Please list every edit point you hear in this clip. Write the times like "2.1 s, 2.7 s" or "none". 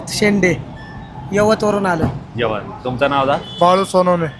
none